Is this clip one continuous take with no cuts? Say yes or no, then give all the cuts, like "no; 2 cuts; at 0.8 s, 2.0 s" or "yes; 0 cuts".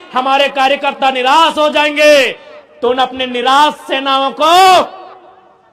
yes; 0 cuts